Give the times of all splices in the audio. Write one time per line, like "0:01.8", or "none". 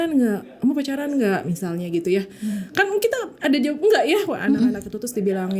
none

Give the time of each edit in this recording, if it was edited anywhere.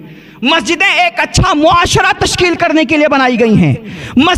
none

